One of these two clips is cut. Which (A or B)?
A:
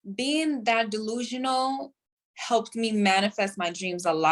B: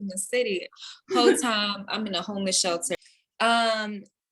B